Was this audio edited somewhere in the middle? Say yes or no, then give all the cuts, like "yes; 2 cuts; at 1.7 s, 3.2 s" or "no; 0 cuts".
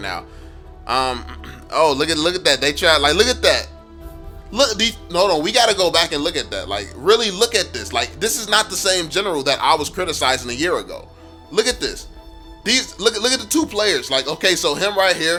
no; 0 cuts